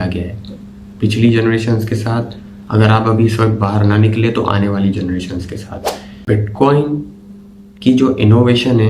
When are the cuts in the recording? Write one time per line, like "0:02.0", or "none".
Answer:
0:06.3